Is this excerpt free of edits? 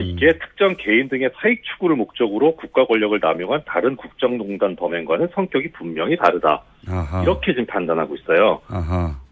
no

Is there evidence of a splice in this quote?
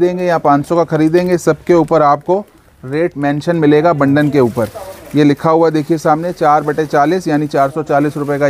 no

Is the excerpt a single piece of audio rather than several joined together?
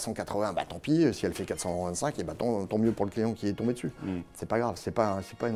yes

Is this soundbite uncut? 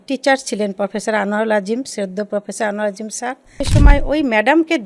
no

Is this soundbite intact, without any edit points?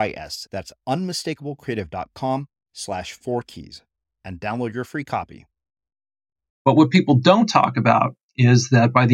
no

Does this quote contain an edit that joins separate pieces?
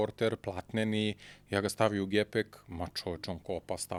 no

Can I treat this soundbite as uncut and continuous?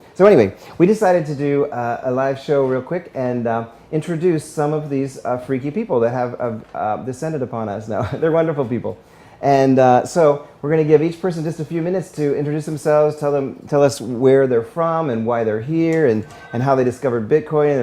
no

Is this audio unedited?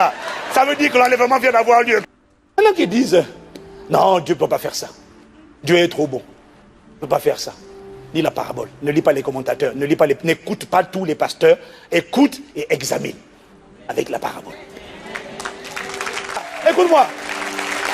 no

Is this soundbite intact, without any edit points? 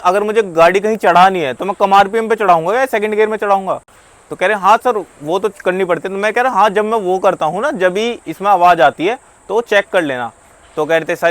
yes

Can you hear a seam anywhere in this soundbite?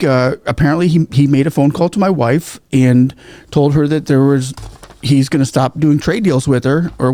no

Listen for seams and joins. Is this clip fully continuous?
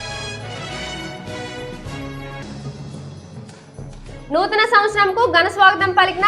no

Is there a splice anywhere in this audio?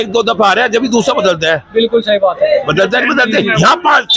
no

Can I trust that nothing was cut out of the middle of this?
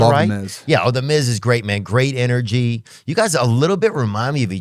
yes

